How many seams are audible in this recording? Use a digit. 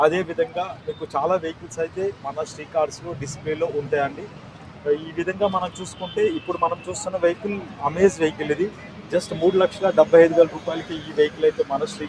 0